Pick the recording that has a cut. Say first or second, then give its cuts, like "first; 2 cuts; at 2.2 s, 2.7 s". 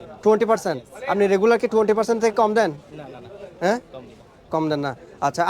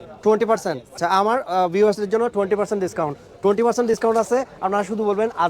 second; 1 cut; at 1.0 s